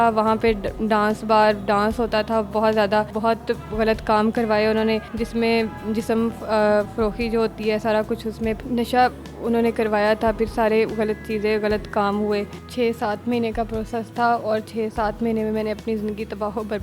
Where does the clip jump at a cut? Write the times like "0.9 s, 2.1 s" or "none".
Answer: 3.1 s, 5.1 s, 8.6 s, 12.6 s

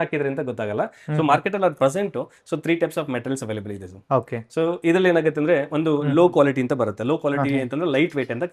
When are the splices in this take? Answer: none

